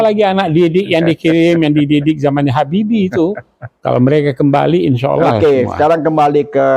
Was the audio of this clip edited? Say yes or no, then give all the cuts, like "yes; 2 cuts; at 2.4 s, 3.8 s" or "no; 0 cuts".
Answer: no; 0 cuts